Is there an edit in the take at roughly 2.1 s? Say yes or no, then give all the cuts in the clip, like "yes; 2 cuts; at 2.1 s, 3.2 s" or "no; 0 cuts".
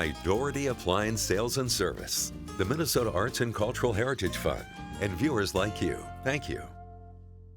no; 1 cut; at 6.6 s